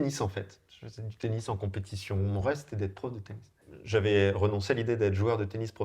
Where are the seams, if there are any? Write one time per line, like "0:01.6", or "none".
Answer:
0:03.6